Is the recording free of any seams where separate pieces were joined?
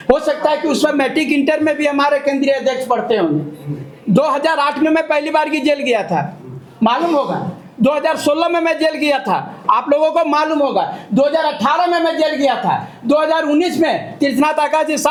yes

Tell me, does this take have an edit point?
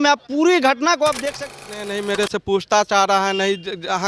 yes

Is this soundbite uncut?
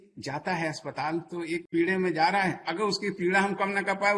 no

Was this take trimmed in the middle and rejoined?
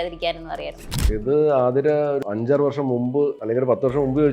yes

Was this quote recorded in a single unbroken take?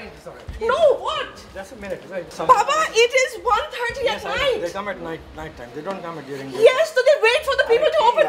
no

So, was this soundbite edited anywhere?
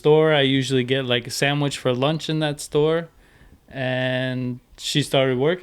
no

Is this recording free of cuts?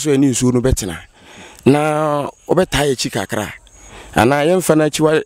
yes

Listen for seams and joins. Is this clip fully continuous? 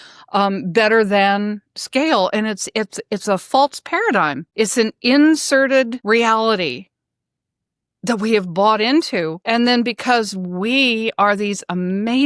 no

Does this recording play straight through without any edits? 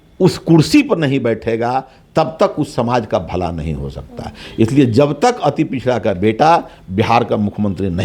yes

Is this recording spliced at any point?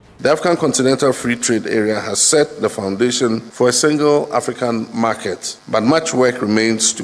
yes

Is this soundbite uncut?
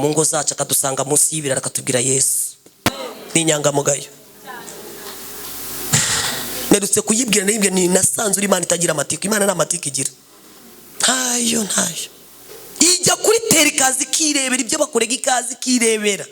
no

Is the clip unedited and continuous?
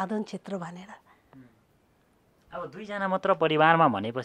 yes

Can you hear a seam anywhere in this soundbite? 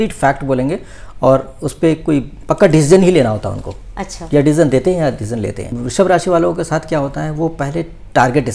yes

